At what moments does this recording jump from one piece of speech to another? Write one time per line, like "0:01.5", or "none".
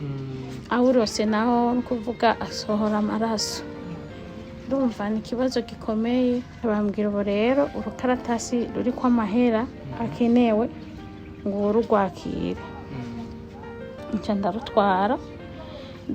0:06.5

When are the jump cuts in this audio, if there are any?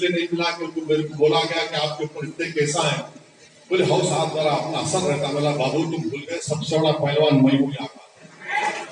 none

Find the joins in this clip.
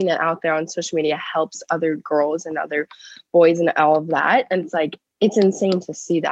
0:05.0

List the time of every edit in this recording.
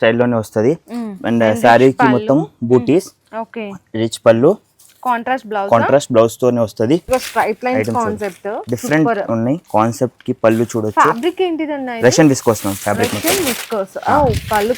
0:07.0

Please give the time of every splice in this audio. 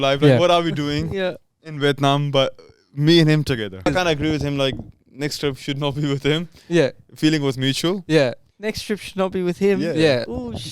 0:03.9

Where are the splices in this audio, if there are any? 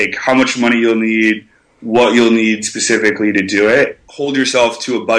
0:04.0

